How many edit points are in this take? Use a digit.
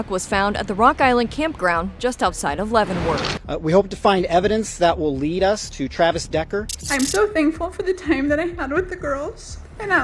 2